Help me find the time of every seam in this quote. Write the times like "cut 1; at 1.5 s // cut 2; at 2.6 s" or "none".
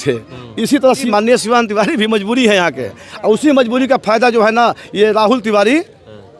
cut 1; at 1.0 s